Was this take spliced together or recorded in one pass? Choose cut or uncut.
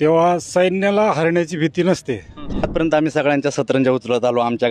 cut